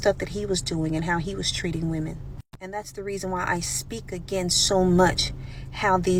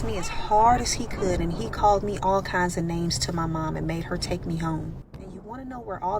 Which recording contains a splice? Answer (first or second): second